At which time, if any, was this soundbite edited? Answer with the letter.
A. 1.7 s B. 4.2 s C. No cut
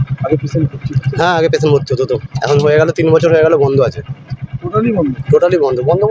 C